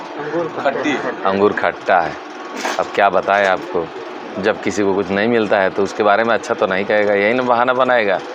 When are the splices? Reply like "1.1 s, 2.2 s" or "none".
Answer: none